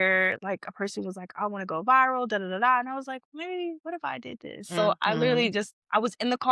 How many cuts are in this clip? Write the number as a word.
zero